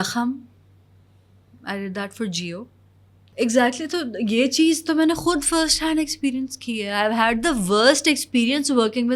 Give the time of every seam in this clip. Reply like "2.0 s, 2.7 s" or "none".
3.3 s